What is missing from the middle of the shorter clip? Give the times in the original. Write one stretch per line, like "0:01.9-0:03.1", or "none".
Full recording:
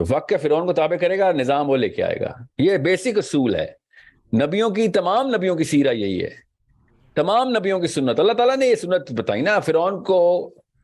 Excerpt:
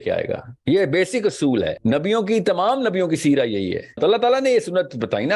0:03.7-0:04.2
0:06.5-0:08.1